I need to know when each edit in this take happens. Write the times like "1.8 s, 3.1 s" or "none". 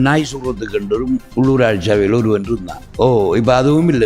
1.3 s, 2.8 s